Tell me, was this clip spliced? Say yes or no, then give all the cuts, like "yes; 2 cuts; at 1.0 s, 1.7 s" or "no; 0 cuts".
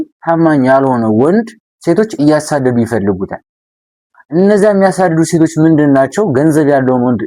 no; 0 cuts